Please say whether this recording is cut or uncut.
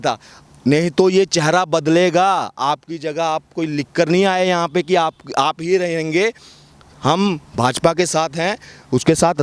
uncut